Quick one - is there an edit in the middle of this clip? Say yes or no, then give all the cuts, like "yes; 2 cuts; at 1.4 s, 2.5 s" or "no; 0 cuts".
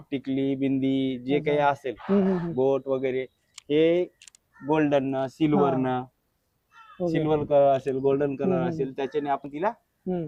no; 0 cuts